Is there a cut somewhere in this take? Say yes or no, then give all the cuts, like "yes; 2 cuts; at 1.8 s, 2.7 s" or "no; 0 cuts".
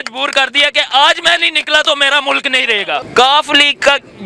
yes; 1 cut; at 3.0 s